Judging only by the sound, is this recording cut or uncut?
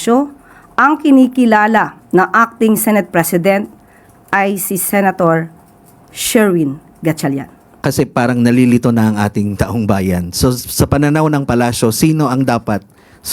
cut